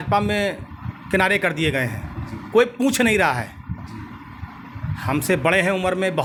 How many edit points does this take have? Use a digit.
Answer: 0